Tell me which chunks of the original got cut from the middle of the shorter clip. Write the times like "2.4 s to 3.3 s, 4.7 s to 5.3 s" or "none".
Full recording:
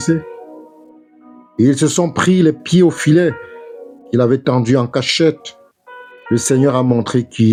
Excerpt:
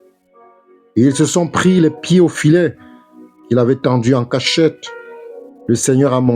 none